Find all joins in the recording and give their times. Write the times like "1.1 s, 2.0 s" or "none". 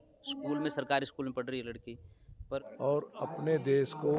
2.6 s